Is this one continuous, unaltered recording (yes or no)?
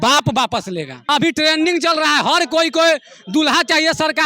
no